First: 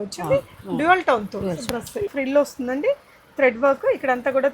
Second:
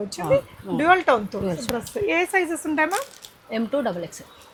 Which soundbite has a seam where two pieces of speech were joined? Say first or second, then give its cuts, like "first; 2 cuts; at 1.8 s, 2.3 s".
first; 1 cut; at 2.1 s